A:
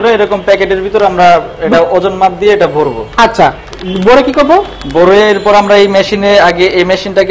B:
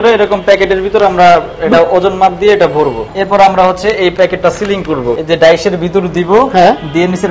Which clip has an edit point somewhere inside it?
B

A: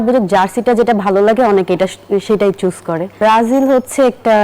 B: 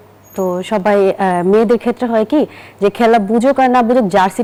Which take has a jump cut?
A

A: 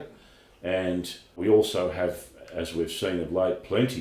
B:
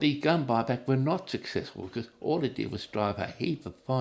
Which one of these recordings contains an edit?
A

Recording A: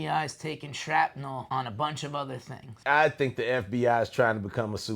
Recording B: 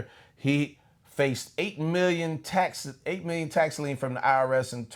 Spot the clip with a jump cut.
A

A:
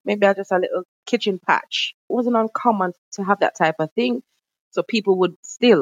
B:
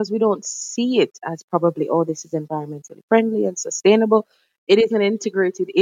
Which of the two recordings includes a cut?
A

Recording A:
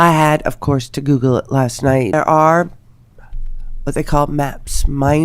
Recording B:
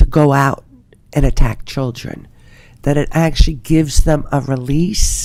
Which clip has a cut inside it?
A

